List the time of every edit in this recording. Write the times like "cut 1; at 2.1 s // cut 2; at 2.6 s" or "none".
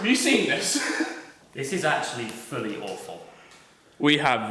cut 1; at 1.3 s